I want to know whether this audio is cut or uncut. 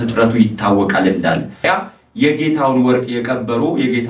cut